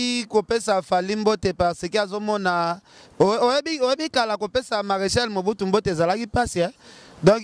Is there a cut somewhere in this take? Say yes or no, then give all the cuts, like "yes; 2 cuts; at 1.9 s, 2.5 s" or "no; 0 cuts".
no; 0 cuts